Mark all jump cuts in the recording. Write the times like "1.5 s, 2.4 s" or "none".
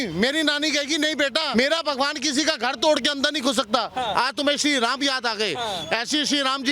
1.5 s